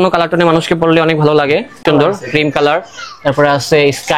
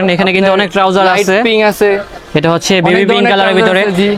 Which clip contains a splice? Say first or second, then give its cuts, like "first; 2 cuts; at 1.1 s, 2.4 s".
first; 1 cut; at 1.8 s